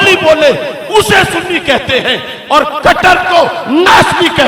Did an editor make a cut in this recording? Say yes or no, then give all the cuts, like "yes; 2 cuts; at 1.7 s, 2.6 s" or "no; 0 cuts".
no; 0 cuts